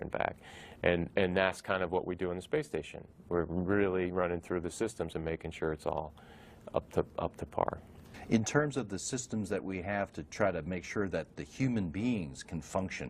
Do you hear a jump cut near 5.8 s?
yes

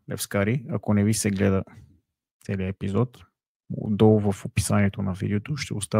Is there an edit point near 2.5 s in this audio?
no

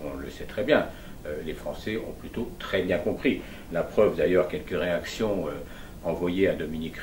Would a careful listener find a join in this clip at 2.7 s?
no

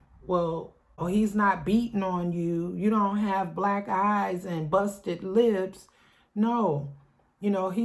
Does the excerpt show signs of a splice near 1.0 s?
yes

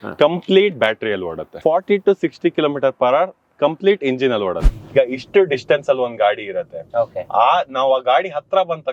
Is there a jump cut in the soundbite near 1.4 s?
yes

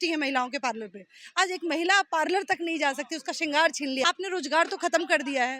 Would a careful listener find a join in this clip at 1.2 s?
no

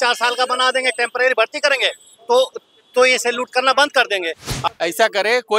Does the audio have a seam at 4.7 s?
yes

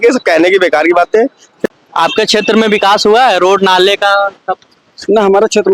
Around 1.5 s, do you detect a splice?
yes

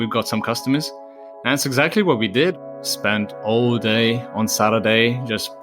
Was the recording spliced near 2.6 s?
yes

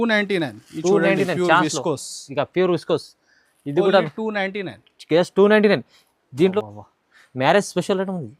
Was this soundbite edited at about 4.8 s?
no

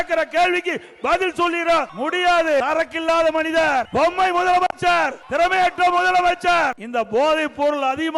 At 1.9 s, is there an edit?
yes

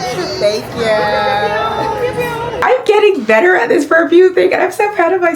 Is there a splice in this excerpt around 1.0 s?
no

